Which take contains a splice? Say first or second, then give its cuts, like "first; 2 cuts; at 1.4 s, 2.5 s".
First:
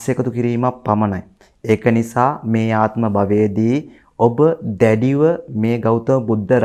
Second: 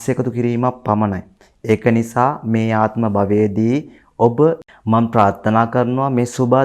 second; 1 cut; at 4.7 s